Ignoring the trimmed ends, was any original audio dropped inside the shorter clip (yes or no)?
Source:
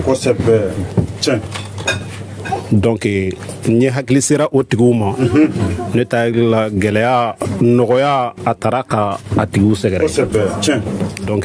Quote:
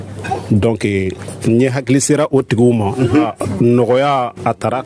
yes